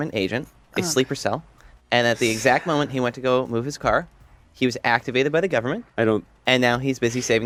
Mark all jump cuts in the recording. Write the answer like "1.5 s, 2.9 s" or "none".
none